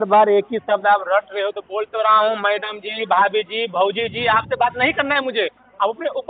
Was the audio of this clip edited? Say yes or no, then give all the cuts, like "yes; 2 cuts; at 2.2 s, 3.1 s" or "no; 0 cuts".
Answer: no; 0 cuts